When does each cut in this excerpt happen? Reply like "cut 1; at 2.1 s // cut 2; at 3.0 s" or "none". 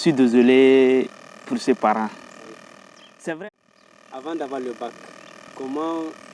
cut 1; at 3.5 s